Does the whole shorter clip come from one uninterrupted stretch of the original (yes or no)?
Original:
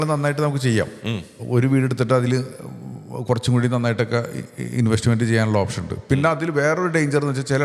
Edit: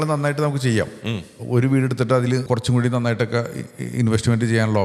no